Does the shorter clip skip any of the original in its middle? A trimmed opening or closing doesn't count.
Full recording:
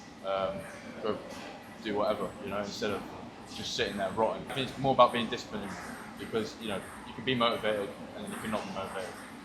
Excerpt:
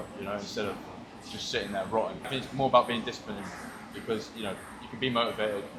no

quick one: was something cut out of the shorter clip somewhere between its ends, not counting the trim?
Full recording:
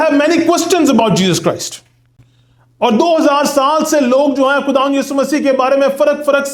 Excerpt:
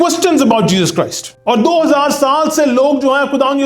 yes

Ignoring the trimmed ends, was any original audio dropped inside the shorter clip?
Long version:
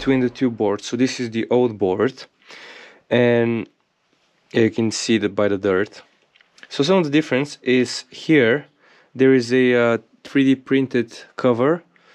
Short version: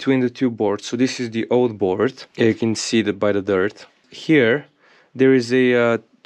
yes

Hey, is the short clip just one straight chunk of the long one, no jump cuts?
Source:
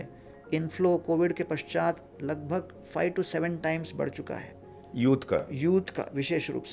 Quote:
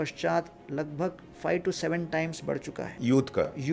no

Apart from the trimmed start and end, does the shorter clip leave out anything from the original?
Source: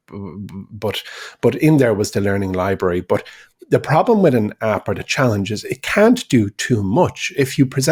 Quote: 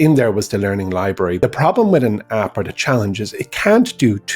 yes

